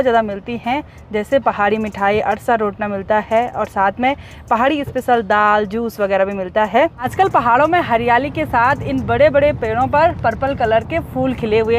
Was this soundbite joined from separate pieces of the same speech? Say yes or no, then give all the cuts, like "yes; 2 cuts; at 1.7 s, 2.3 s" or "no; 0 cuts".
no; 0 cuts